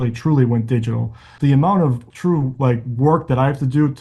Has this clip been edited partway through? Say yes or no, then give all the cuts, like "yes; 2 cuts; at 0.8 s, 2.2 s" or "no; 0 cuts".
yes; 2 cuts; at 1.3 s, 2.1 s